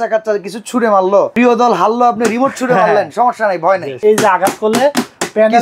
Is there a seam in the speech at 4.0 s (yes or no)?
yes